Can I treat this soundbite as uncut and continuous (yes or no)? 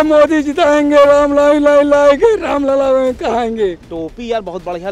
no